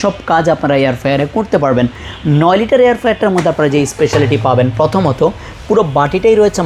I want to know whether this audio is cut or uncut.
uncut